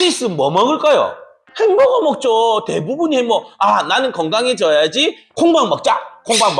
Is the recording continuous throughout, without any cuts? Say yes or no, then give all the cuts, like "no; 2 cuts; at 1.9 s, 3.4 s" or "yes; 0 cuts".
no; 1 cut; at 5.2 s